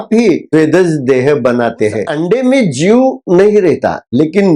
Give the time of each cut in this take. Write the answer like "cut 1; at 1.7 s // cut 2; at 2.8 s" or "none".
cut 1; at 2.1 s